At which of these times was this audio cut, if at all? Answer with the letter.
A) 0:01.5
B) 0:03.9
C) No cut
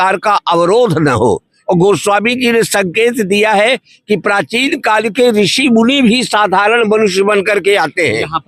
A